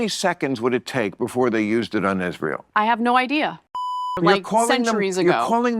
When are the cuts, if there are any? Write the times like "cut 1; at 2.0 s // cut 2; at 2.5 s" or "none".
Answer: cut 1; at 3.8 s